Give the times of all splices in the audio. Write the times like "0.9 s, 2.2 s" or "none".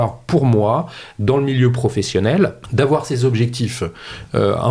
2.6 s